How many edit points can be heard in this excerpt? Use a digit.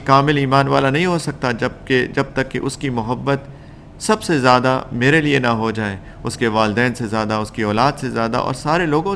0